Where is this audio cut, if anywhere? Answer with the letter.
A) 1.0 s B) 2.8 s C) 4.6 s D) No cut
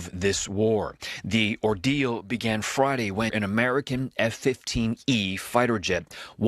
A